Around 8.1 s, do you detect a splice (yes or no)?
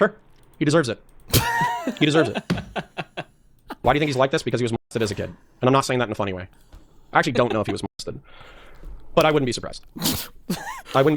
no